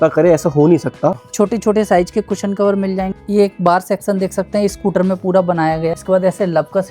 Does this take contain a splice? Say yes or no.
yes